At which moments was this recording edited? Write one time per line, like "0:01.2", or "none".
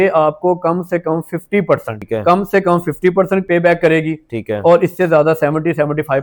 0:02.0